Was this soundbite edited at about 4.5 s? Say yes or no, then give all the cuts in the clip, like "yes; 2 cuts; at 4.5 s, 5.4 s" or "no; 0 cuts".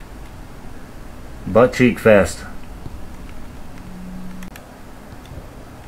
yes; 1 cut; at 4.5 s